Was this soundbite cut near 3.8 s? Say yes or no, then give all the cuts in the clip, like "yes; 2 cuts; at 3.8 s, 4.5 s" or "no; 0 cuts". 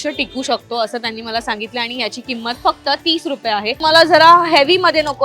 yes; 1 cut; at 3.8 s